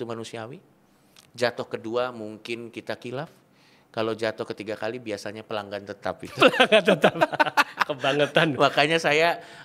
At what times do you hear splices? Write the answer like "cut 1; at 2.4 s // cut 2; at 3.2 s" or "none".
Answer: none